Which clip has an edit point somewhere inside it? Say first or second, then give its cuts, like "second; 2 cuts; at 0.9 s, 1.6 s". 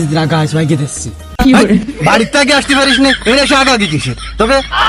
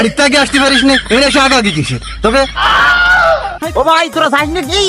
second; 1 cut; at 3.6 s